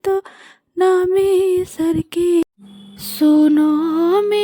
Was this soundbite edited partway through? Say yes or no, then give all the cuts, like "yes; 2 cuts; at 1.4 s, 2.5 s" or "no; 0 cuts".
yes; 1 cut; at 2.4 s